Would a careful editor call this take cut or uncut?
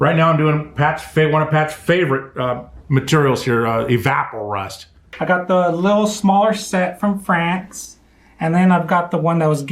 cut